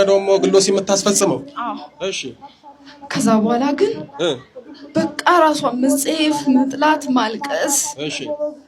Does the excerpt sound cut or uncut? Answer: uncut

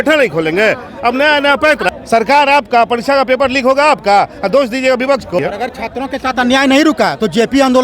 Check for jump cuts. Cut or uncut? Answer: cut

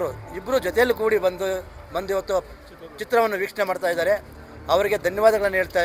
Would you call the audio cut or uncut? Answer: uncut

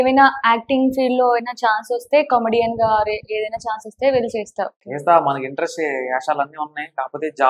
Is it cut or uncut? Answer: cut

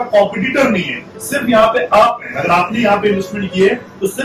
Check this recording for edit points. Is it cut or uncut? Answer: uncut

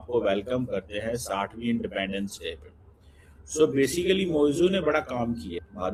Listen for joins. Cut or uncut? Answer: uncut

